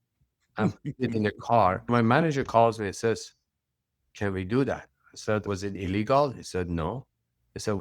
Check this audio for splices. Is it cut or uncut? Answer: cut